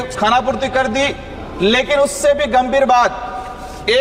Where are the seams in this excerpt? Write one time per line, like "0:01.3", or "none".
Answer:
none